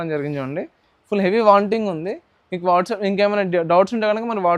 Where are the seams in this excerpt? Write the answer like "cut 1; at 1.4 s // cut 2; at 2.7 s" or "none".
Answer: none